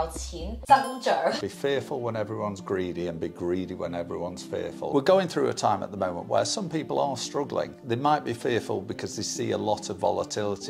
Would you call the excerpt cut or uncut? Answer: cut